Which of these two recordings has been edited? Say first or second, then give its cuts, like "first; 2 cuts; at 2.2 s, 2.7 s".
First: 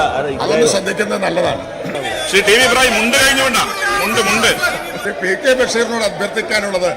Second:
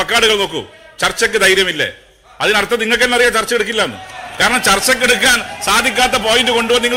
first; 2 cuts; at 2.0 s, 5.0 s